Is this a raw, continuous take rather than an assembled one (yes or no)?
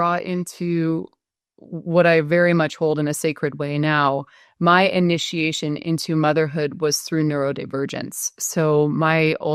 yes